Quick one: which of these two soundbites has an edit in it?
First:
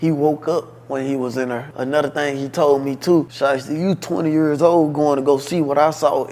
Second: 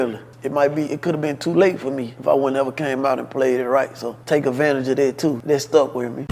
first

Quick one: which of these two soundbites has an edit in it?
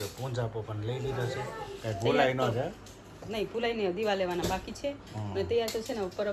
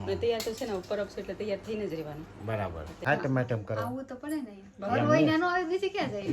second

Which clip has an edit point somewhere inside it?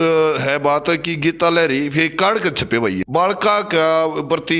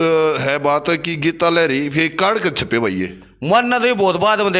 first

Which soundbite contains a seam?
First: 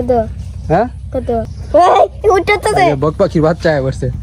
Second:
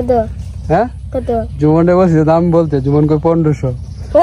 first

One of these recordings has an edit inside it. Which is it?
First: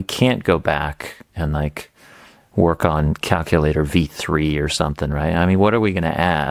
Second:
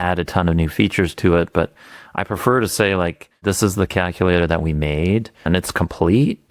second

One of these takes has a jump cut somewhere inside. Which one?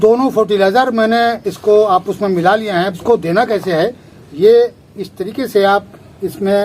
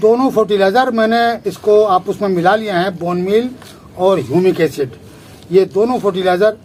first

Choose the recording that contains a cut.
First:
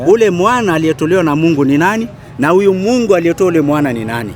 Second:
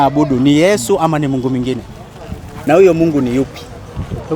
second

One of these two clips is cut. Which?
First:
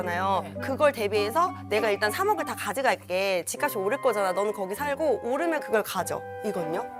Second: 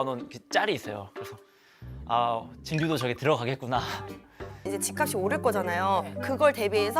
second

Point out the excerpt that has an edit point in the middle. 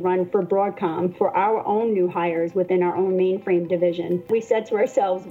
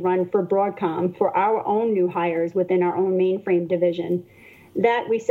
first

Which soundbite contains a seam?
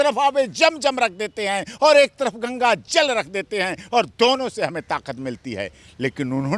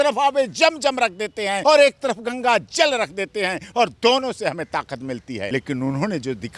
second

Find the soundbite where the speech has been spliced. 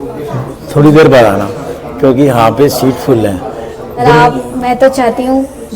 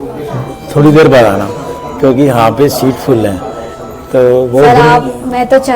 first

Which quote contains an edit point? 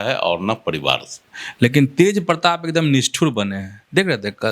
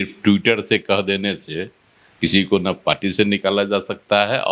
first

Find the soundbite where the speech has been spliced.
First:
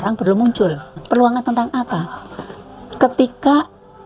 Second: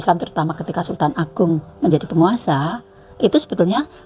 first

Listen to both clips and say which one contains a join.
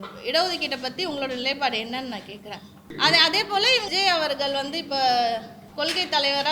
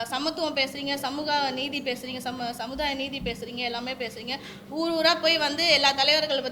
first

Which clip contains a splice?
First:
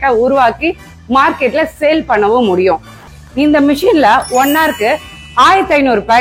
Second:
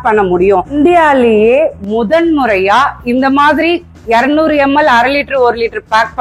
first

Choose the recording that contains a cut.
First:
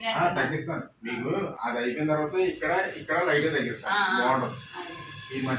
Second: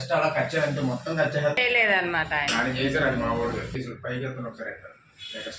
second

